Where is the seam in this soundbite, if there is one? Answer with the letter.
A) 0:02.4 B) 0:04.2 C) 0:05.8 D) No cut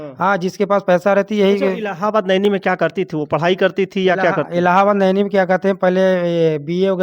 D